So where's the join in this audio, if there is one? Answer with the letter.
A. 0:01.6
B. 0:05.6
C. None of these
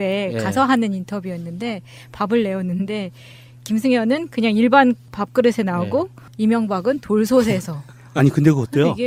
C